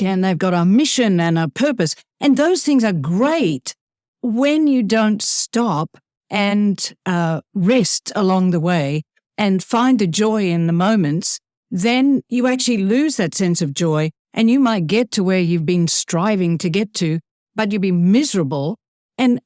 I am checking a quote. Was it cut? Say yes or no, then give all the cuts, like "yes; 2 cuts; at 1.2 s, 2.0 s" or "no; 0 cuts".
no; 0 cuts